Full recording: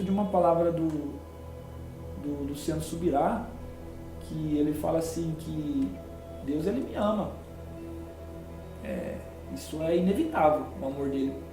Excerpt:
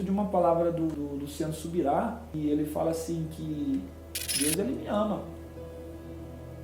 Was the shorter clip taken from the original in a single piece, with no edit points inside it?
no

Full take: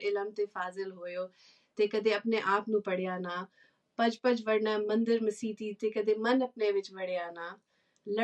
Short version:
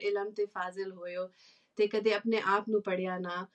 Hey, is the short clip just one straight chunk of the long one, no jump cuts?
yes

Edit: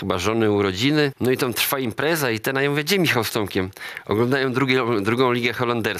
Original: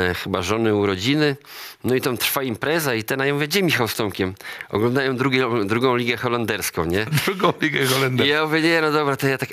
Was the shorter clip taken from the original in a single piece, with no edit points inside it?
no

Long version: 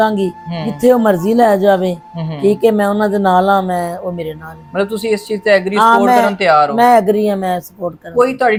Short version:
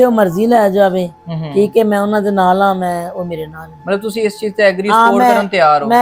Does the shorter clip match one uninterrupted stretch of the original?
yes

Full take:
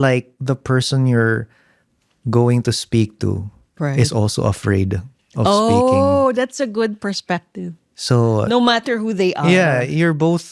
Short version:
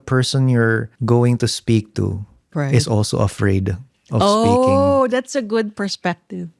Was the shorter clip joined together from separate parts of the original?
yes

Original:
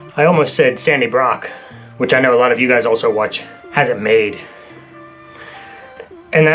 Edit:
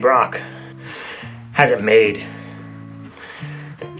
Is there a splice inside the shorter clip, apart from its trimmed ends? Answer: yes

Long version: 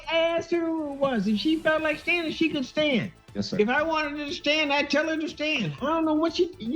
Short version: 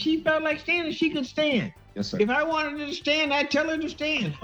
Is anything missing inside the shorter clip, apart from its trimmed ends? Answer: no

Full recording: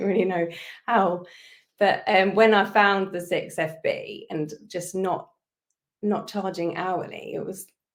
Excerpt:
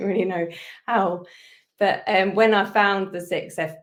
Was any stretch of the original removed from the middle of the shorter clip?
no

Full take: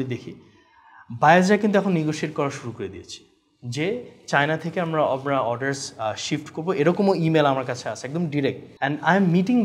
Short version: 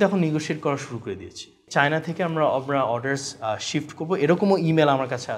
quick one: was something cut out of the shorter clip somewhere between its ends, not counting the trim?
yes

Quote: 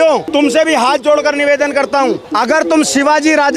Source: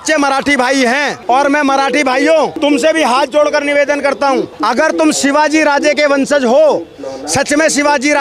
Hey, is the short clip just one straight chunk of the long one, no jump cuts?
yes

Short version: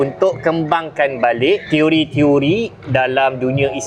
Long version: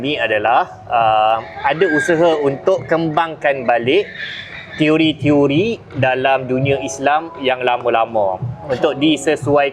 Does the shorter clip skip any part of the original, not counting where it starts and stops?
yes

